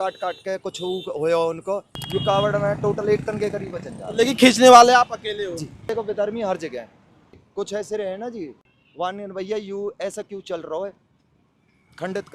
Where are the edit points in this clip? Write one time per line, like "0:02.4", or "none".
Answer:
0:01.9
0:05.8
0:07.4
0:08.7